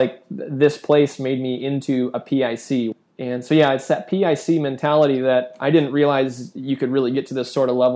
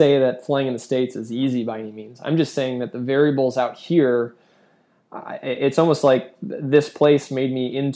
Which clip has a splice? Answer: first; 1 cut; at 2.9 s

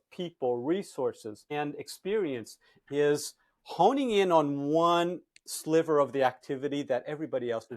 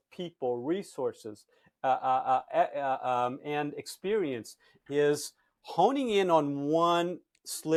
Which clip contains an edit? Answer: first; 1 cut; at 1.4 s

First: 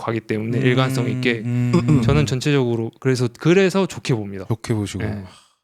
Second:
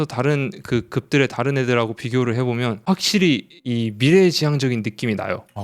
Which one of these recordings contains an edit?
second; 2 cuts; at 2.8 s, 3.5 s

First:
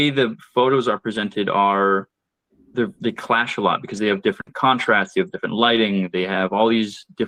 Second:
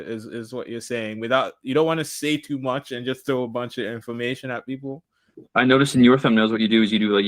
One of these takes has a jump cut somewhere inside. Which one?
second; 1 cut; at 5.4 s

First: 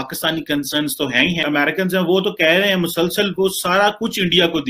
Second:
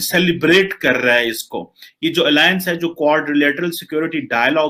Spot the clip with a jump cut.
first; 1 cut; at 1.4 s

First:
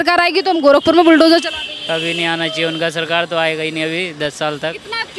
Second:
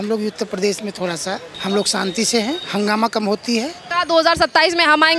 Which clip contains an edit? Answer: second; 3 cuts; at 1.5 s, 2.6 s, 3.8 s

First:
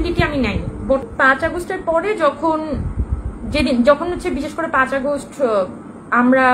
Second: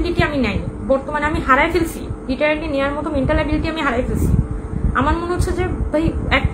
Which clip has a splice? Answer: first; 1 cut; at 1.1 s

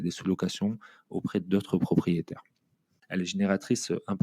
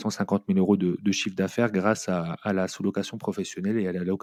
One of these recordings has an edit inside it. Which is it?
first; 1 cut; at 2.9 s

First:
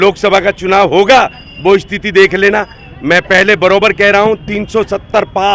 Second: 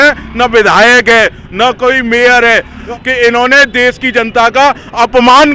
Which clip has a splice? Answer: second; 1 cut; at 2.9 s

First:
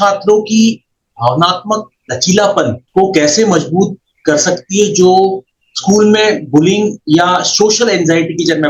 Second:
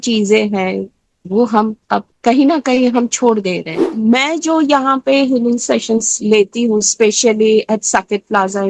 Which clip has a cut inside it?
second; 1 cut; at 3.8 s

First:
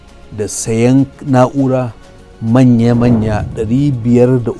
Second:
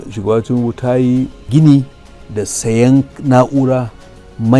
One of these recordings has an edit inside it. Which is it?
first; 1 cut; at 3.6 s

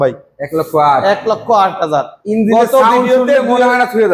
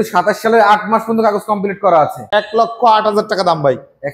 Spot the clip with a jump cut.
second; 1 cut; at 2.2 s

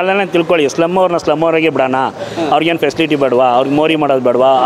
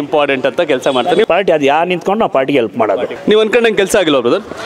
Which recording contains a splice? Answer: second; 2 cuts; at 1.2 s, 3.1 s

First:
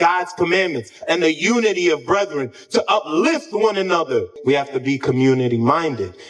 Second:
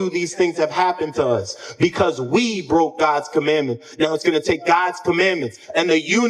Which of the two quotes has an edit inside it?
first; 1 cut; at 4.3 s

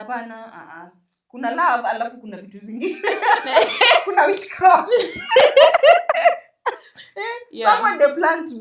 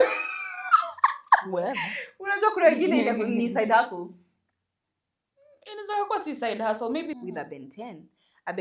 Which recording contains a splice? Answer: second; 1 cut; at 7.1 s

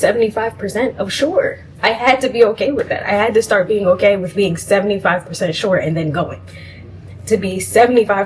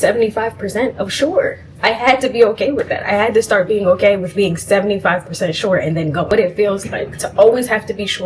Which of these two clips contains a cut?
second; 1 cut; at 6.3 s

